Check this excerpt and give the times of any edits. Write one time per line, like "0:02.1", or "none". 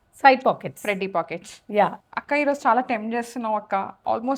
0:02.0